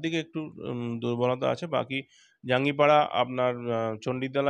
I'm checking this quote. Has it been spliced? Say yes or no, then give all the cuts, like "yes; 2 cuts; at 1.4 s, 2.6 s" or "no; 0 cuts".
no; 0 cuts